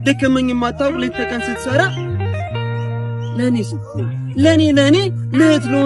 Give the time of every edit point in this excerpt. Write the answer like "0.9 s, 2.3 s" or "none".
none

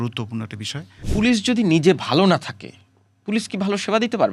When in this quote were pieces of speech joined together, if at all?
1.0 s

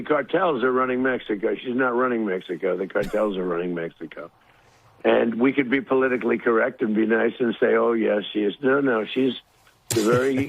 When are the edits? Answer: 4.7 s

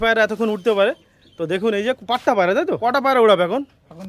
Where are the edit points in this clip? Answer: 2.8 s

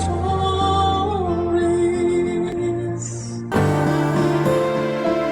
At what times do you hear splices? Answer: 3.3 s

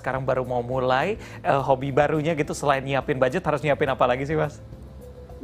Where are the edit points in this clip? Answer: none

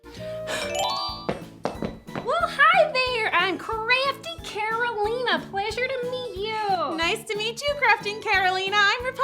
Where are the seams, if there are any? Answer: 1.0 s

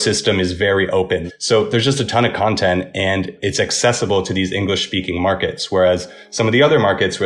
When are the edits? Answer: 1.3 s

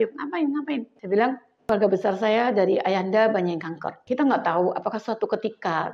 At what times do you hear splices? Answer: 0.9 s, 1.5 s, 3.9 s

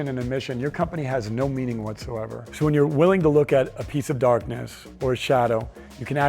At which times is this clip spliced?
2.4 s

